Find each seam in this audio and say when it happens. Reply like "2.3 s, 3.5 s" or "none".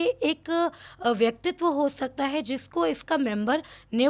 none